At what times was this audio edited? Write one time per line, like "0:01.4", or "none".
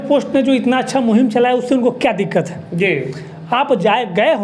none